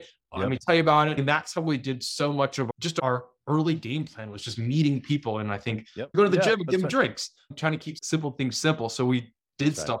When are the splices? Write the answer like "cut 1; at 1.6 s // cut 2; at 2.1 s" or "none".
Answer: cut 1; at 1.2 s // cut 2; at 2.7 s // cut 3; at 6.1 s // cut 4; at 7.9 s